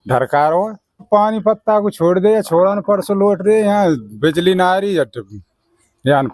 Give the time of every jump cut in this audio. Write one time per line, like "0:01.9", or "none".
0:01.1